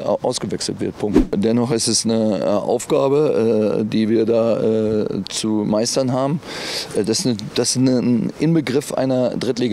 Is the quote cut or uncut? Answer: cut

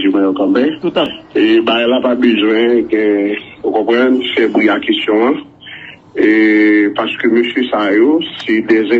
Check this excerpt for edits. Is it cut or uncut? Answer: cut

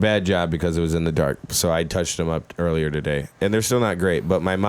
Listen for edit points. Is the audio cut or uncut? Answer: uncut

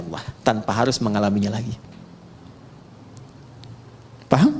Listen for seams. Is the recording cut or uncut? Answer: uncut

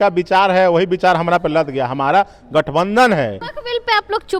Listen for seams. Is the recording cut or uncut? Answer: cut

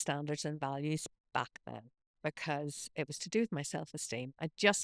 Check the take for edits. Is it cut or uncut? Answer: uncut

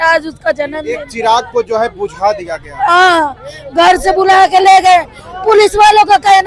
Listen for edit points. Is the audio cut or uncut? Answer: uncut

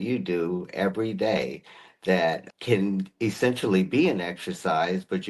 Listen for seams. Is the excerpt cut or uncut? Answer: cut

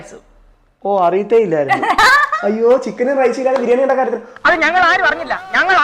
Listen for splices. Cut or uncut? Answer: uncut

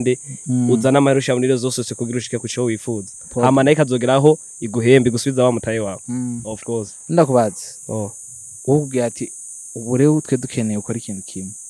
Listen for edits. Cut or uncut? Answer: uncut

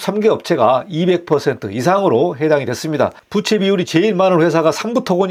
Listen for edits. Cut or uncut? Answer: uncut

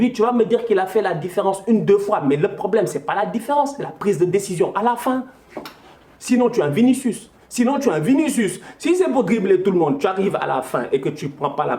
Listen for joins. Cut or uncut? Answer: uncut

